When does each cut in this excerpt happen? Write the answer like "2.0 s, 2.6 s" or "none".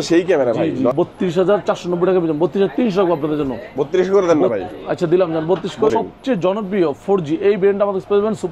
0.9 s, 5.9 s